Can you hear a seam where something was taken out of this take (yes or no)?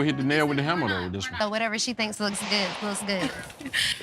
yes